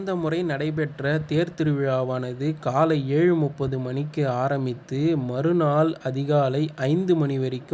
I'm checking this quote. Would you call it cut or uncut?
uncut